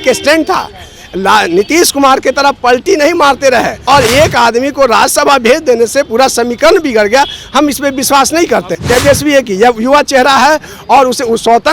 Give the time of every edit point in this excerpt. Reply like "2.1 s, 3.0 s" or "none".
3.8 s, 8.7 s